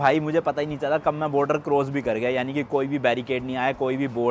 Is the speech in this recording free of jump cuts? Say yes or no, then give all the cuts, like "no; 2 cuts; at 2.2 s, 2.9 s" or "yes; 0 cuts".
yes; 0 cuts